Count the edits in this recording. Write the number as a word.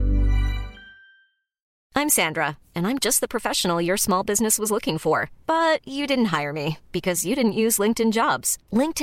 one